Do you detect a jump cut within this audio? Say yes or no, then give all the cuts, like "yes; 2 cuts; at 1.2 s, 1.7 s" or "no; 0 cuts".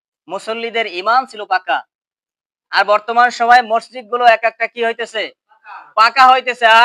no; 0 cuts